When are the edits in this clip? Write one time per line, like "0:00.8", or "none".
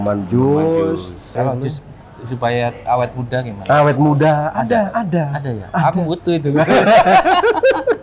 0:01.4